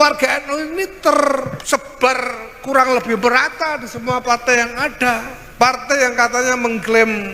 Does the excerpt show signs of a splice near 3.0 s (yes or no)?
no